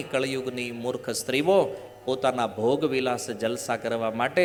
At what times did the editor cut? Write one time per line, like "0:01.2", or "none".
none